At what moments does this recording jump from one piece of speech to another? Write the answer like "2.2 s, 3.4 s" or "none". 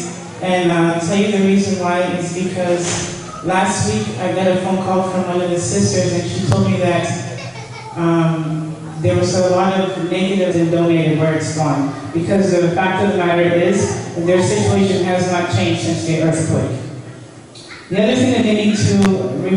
none